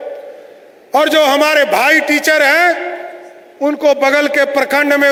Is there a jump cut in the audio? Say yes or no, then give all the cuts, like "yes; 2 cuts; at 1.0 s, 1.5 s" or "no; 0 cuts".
no; 0 cuts